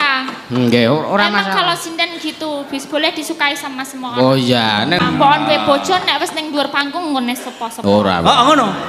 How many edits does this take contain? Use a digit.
1